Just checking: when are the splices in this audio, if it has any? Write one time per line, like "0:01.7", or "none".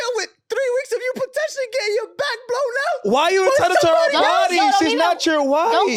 none